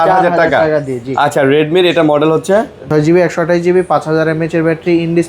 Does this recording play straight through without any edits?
no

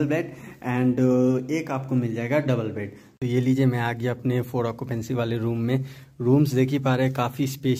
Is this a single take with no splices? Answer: yes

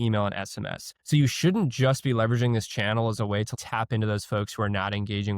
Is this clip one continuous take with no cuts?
no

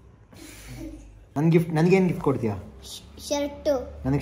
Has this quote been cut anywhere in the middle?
yes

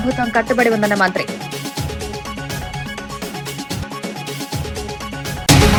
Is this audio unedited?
yes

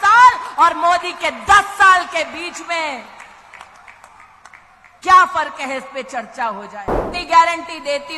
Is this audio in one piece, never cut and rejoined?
no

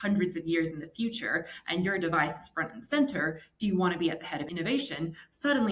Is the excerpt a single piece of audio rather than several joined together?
no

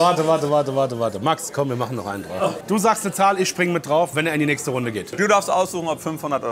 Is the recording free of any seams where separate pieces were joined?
no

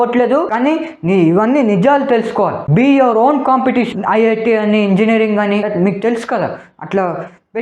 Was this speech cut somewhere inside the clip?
yes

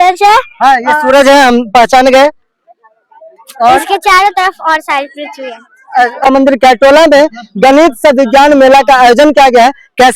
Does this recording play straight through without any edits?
no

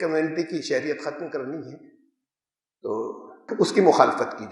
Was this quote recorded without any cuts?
no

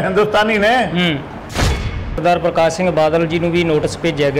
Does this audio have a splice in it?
yes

